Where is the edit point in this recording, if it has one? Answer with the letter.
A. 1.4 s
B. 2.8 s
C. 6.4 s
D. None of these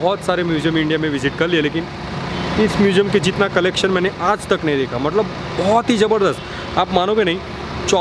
D